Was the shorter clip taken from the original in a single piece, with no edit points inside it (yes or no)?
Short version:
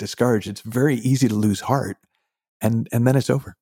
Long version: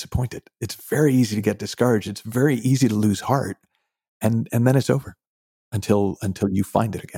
yes